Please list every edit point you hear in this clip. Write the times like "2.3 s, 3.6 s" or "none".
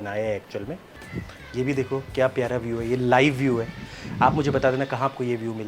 0.9 s